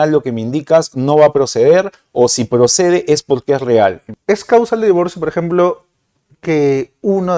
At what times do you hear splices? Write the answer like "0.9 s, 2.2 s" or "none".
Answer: 4.1 s